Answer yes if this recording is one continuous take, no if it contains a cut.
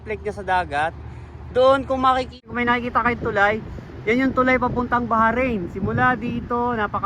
no